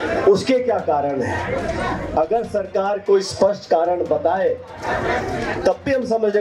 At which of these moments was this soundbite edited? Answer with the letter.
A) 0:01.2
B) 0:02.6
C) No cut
C